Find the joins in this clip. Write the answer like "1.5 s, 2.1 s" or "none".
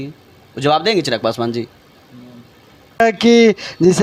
none